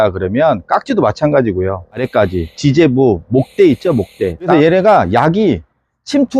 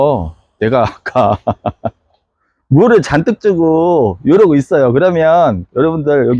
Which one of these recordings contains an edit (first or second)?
first